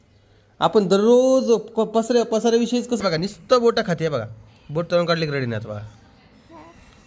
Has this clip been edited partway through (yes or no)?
yes